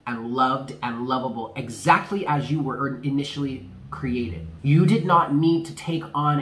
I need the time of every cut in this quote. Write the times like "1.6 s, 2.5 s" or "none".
4.5 s

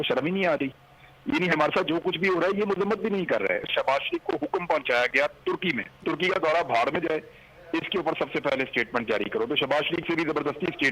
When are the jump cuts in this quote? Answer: 3.7 s, 6.0 s

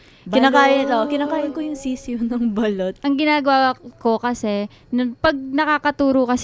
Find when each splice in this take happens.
3.0 s

